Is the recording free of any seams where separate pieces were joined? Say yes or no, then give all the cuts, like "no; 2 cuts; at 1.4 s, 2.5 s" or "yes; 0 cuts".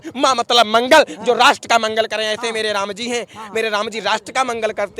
yes; 0 cuts